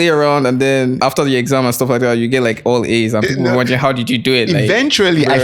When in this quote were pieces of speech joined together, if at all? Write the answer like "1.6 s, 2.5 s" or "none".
1.0 s